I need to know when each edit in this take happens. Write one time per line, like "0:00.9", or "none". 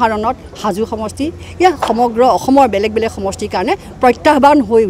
none